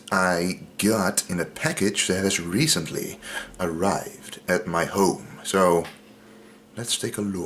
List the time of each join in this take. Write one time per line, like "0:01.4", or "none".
0:04.2